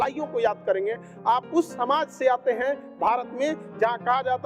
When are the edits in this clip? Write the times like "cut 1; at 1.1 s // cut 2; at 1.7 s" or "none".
none